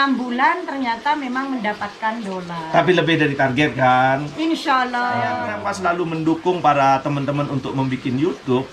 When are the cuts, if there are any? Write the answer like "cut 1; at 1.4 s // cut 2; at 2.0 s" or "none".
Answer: cut 1; at 5.5 s